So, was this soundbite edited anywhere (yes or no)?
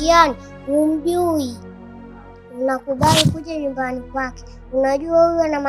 no